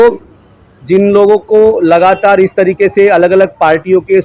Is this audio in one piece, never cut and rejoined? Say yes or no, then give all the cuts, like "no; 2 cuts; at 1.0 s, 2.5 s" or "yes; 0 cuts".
yes; 0 cuts